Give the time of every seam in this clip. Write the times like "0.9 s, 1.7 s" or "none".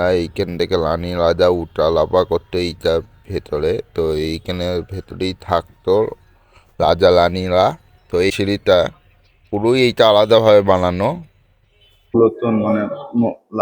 8.3 s, 12.1 s